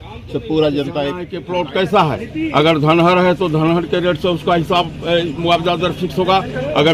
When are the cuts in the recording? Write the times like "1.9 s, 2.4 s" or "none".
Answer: 1.4 s